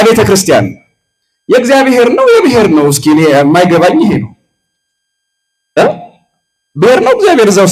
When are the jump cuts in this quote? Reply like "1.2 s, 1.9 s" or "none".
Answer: none